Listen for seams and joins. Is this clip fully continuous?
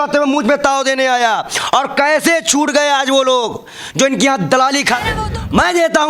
no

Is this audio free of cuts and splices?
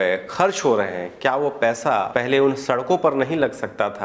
no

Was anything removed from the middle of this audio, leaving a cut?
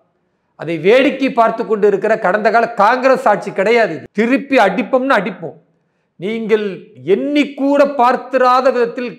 yes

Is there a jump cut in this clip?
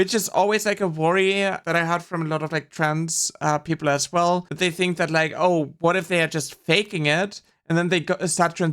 yes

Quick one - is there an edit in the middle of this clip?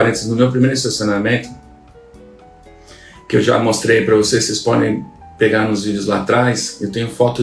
no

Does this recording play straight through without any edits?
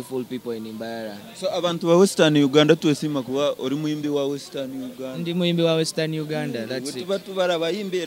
yes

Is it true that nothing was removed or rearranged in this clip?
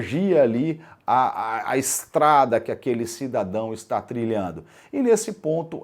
yes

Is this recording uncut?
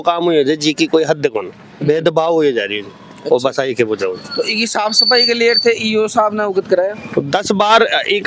yes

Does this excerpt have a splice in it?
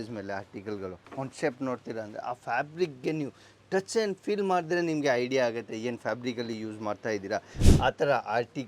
yes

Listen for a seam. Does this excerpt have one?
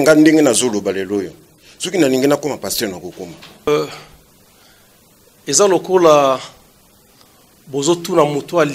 yes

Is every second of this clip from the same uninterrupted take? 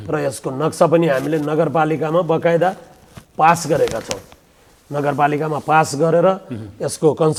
yes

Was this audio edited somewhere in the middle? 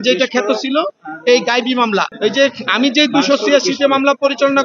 yes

